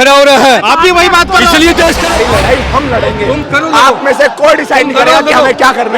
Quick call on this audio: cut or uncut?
cut